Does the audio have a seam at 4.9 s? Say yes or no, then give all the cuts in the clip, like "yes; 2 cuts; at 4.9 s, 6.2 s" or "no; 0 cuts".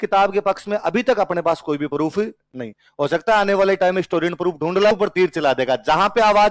yes; 1 cut; at 4.9 s